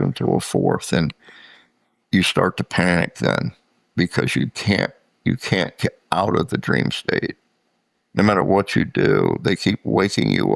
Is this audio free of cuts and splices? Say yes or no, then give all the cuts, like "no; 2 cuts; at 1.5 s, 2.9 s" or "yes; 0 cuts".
yes; 0 cuts